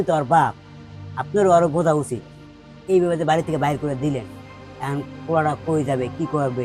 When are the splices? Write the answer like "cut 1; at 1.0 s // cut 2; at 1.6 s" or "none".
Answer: none